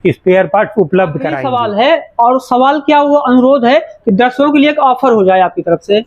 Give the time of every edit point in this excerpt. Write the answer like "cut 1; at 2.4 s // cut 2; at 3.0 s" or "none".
cut 1; at 1.4 s